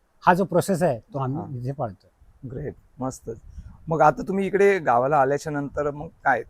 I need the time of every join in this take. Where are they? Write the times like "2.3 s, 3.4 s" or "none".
none